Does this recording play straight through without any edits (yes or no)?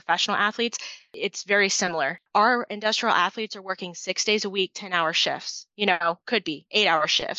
no